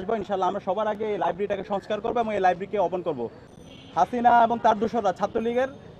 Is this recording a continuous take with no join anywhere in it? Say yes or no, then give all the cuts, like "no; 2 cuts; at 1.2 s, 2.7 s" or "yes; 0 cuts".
no; 1 cut; at 3.4 s